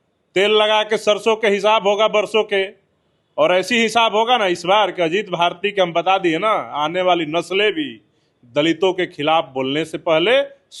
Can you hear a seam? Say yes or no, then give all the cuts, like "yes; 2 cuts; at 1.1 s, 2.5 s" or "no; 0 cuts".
no; 0 cuts